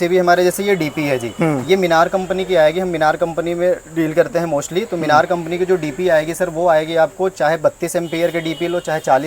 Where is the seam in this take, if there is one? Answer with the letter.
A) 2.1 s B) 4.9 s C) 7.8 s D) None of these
D